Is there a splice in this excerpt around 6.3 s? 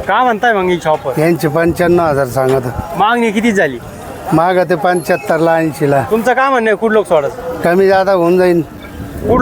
no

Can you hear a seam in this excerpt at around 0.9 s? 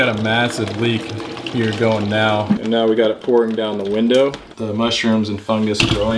no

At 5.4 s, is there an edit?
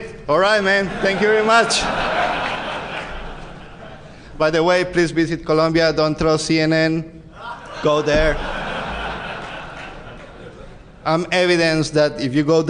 yes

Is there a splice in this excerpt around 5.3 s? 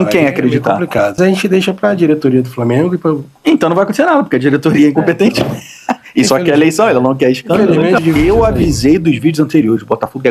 no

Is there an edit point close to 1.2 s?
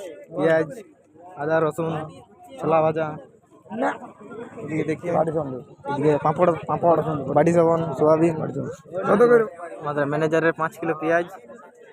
no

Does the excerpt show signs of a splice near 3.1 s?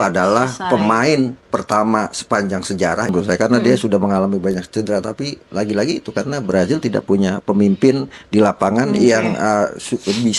yes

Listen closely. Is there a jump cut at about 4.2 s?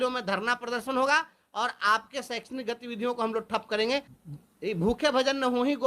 yes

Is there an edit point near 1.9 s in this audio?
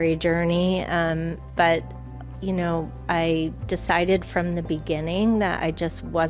no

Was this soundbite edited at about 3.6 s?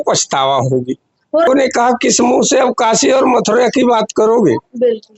no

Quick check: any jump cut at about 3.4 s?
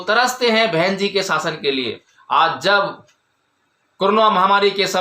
no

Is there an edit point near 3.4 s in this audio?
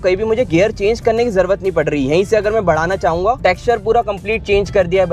yes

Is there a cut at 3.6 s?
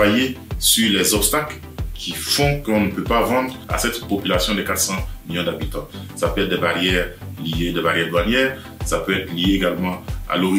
yes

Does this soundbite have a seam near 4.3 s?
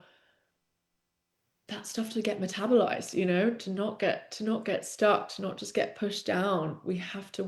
no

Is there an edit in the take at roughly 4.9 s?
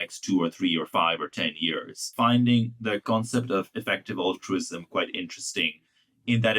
no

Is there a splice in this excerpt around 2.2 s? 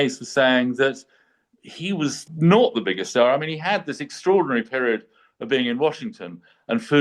yes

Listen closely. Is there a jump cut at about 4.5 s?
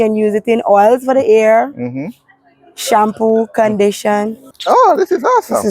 yes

